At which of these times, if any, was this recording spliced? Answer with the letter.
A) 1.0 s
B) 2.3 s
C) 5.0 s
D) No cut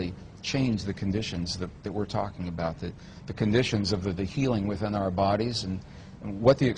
B